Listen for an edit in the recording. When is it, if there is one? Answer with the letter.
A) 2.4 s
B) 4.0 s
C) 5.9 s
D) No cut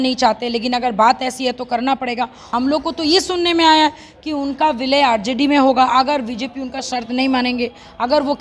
A